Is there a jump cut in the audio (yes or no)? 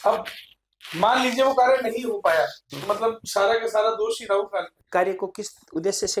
yes